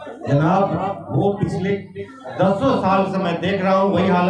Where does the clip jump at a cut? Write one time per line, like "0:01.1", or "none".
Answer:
none